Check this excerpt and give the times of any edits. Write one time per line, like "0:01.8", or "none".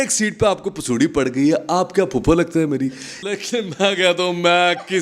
0:03.2

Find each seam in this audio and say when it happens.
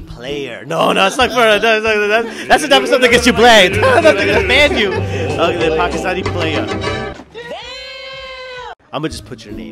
none

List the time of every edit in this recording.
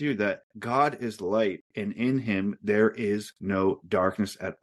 none

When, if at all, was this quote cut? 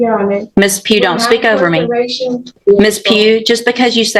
0:02.6

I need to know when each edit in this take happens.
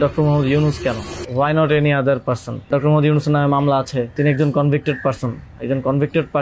0:01.1
0:02.7
0:04.1

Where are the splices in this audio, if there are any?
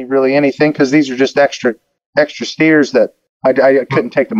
0:01.9
0:03.2

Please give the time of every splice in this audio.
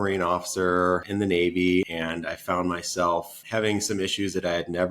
0:01.1
0:01.9
0:03.4

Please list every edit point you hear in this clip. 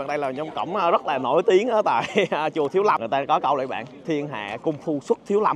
0:03.0

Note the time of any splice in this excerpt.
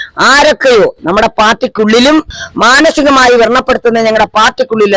0:02.3

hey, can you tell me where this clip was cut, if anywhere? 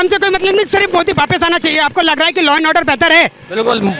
none

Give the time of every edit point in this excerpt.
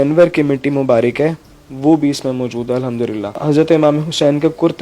0:03.4

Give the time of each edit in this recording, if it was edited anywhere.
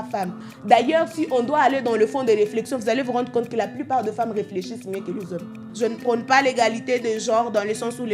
0:05.6

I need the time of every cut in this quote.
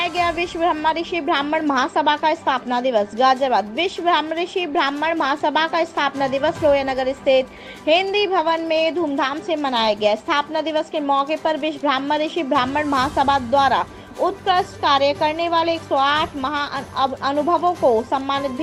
none

